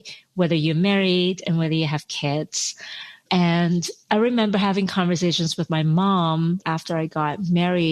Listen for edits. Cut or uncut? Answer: cut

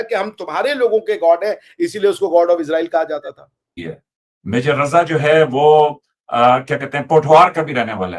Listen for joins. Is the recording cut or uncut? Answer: cut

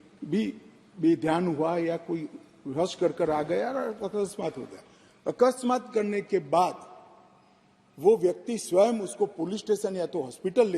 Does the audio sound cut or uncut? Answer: uncut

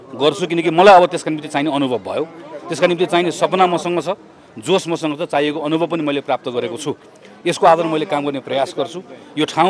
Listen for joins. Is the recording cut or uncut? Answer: uncut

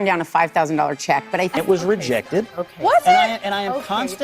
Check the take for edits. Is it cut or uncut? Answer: cut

